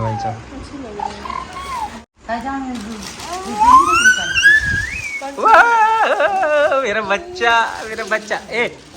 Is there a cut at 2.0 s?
yes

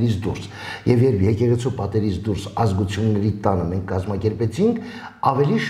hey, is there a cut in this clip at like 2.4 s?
no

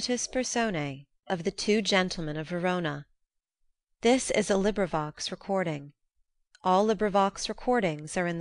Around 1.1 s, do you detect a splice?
yes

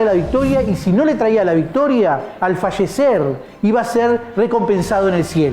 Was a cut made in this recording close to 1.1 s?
no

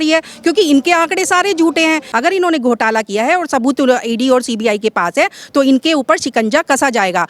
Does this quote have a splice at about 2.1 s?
yes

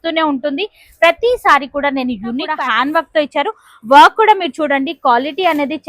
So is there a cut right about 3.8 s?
no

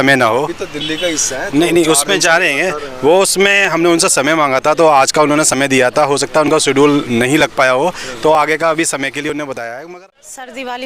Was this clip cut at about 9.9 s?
yes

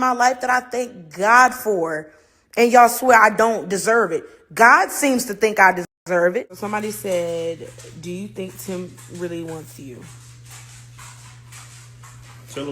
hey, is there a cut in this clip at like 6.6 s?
yes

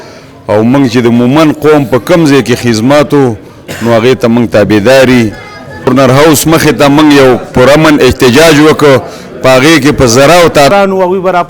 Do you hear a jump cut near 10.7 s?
yes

